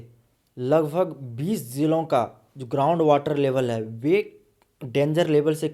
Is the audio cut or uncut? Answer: uncut